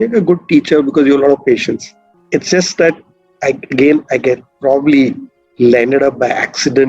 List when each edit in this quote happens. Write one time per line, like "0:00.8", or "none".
none